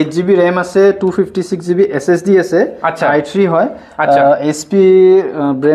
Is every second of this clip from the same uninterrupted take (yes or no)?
yes